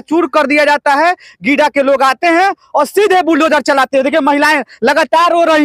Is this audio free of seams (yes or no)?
yes